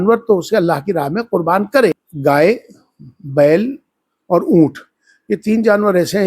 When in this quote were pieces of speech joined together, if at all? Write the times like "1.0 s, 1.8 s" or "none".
2.1 s